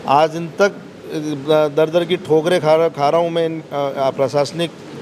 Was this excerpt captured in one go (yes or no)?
yes